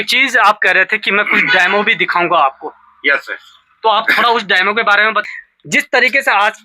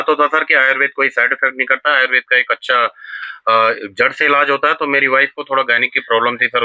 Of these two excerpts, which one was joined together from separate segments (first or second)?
first